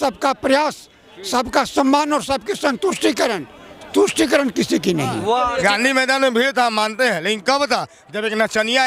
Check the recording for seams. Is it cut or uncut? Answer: cut